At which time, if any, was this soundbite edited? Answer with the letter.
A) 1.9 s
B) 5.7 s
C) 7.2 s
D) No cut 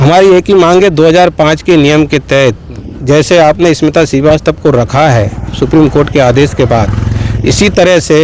D